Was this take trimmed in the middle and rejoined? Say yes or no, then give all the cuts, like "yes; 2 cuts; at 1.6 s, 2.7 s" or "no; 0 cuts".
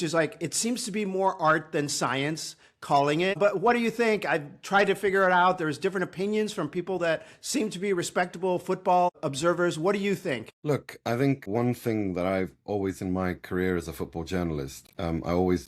yes; 1 cut; at 10.5 s